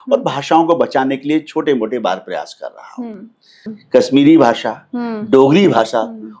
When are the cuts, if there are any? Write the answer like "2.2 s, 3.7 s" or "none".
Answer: 3.8 s